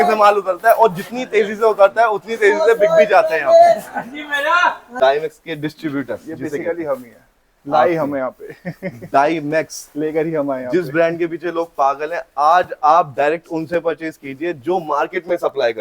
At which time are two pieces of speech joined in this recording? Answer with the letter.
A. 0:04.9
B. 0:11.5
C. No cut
A